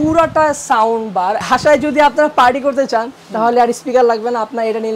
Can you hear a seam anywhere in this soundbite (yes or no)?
yes